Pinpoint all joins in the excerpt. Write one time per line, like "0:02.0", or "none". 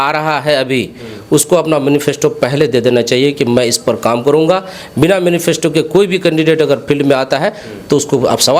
none